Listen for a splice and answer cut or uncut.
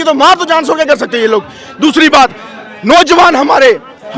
uncut